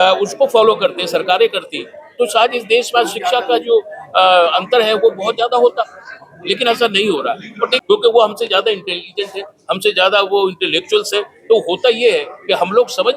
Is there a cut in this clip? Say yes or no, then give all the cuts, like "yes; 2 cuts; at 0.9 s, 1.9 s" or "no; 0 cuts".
yes; 1 cut; at 7.8 s